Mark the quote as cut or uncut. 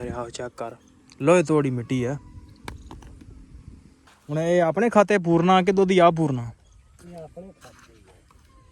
cut